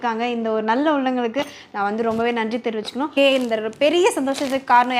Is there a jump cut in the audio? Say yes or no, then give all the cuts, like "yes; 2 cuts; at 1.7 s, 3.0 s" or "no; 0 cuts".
yes; 1 cut; at 3.1 s